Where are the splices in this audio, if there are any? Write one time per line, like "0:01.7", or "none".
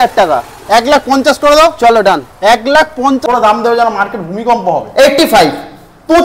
0:03.2